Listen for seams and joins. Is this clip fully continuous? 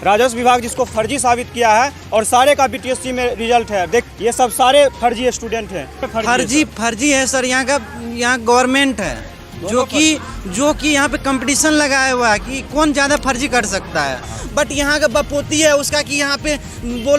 no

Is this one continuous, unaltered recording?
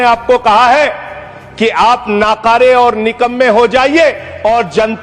yes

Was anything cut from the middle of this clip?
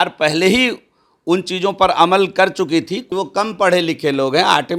yes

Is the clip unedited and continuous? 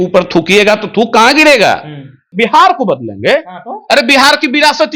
no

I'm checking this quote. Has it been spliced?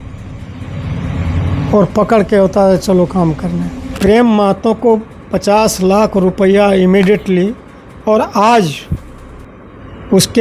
yes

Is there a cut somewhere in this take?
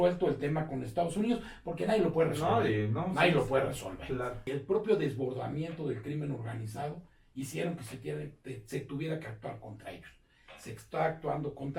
yes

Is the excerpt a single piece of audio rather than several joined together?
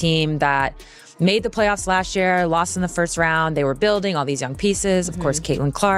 yes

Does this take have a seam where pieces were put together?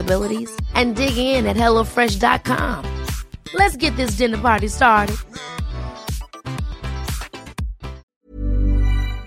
yes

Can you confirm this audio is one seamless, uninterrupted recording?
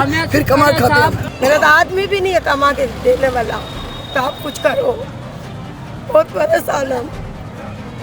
no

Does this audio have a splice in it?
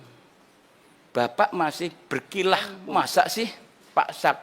yes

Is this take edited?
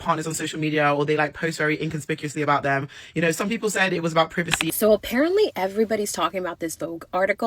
yes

